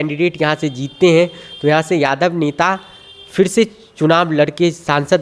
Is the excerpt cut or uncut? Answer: uncut